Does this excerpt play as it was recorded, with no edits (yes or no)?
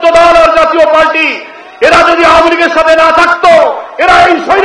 yes